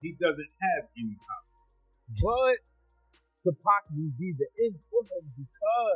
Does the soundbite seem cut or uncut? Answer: cut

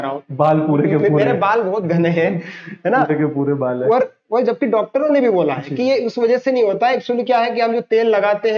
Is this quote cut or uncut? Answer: uncut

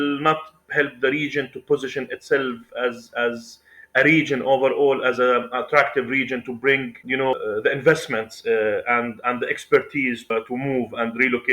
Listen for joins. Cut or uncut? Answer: cut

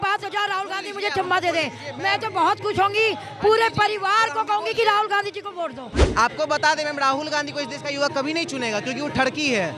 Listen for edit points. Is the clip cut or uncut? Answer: cut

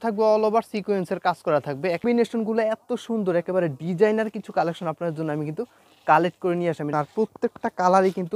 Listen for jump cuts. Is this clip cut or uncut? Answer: cut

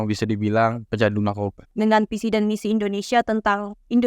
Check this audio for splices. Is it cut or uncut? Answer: cut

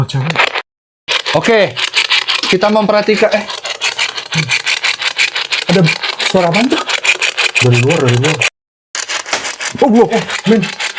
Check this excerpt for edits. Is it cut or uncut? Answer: cut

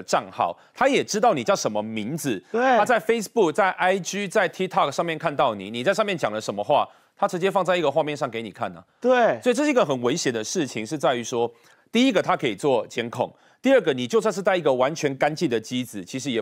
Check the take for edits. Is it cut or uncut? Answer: uncut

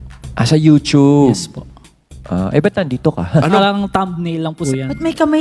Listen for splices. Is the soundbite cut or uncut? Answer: cut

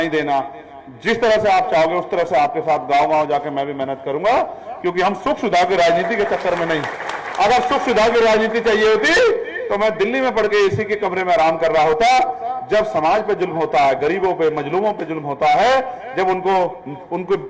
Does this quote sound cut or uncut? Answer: uncut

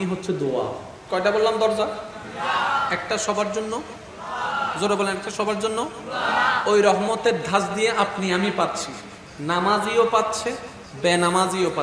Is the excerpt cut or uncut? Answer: cut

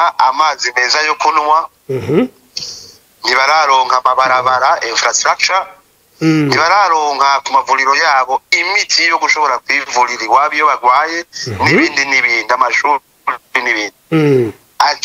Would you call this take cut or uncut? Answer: uncut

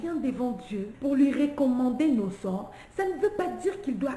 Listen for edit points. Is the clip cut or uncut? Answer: cut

